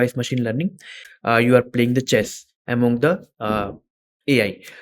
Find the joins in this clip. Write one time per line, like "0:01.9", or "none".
0:01.0